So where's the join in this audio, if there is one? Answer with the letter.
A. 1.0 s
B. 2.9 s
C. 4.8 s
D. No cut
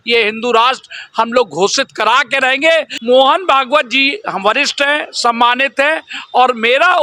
B